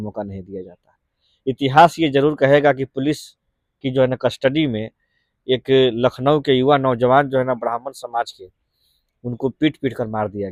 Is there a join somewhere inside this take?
no; 0 cuts

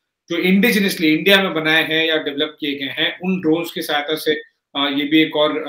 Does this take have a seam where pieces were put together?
no; 0 cuts

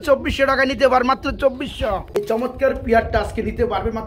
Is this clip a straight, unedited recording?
no; 1 cut; at 2.2 s

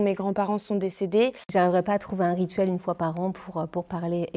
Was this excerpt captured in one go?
no; 1 cut; at 1.5 s

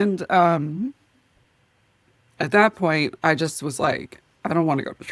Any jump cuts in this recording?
no; 0 cuts

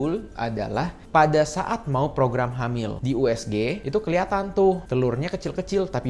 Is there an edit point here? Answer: yes; 1 cut; at 3.0 s

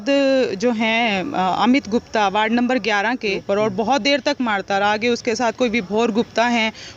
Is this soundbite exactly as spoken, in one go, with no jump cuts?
no; 1 cut; at 3.3 s

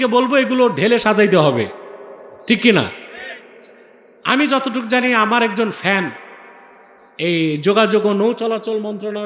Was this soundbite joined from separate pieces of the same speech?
no; 0 cuts

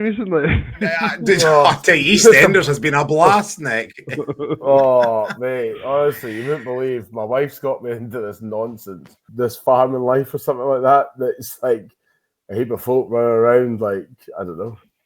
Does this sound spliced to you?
yes; 1 cut; at 9.2 s

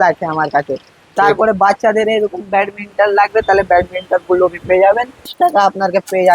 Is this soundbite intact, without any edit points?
no; 1 cut; at 5.3 s

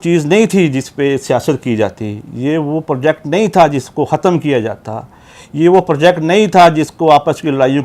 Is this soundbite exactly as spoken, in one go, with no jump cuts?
yes; 0 cuts

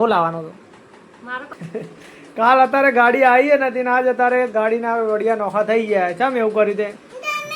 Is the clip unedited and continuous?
no; 1 cut; at 1.5 s

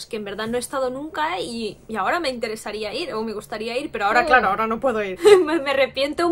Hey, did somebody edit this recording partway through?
yes; 1 cut; at 5.1 s

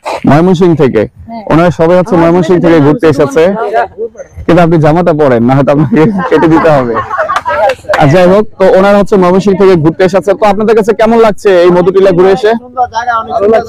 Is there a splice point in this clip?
no; 0 cuts

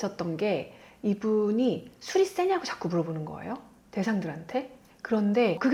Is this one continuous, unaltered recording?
yes; 0 cuts

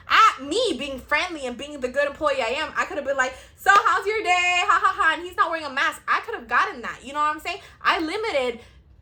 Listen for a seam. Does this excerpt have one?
no; 0 cuts

